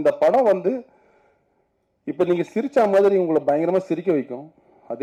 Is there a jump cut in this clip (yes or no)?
no